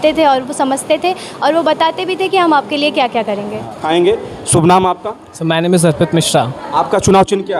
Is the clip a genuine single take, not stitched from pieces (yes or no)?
no